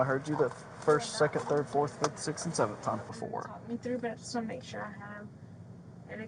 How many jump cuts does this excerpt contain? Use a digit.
1